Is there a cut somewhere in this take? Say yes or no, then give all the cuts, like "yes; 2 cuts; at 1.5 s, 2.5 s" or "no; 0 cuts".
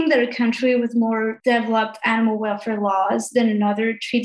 yes; 1 cut; at 1.4 s